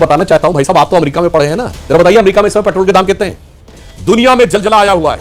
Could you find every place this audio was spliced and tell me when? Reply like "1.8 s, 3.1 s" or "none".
3.9 s